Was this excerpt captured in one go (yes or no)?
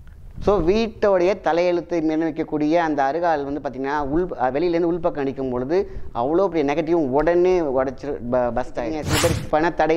no